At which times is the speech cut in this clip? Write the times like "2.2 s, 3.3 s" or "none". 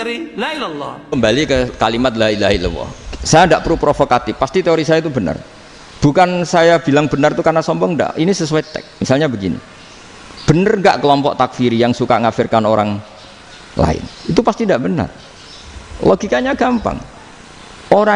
1.0 s